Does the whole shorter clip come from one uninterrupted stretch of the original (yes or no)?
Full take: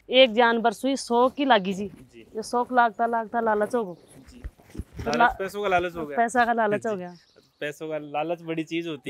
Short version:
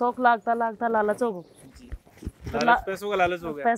yes